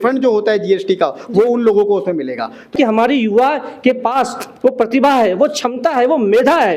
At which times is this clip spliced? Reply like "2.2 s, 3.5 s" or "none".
2.7 s